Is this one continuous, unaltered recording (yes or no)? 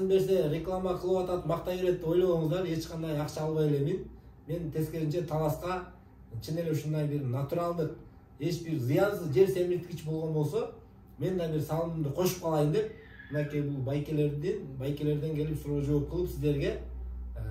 yes